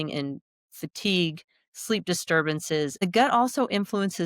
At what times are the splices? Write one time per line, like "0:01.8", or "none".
0:03.0

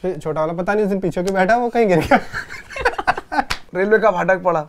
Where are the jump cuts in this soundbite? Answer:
0:03.6

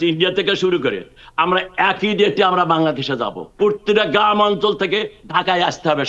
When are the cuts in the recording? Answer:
0:03.4

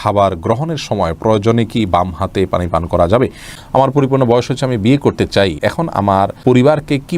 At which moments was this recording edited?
0:03.5
0:06.0

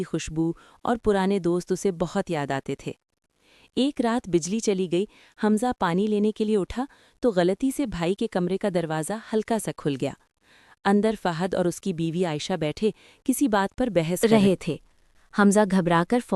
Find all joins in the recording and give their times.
0:14.2

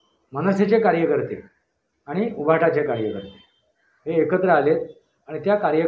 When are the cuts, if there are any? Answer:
none

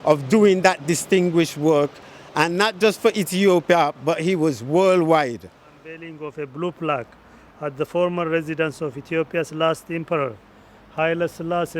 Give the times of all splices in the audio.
0:06.1

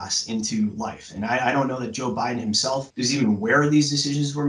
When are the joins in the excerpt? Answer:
0:02.9

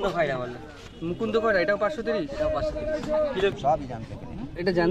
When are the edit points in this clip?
0:03.5

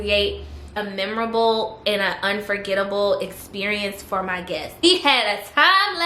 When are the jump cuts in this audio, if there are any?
0:00.8
0:04.8

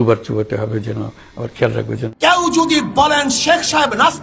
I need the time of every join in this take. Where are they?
0:02.1

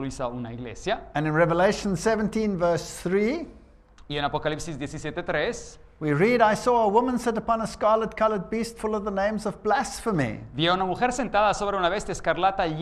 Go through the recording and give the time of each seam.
0:08.9

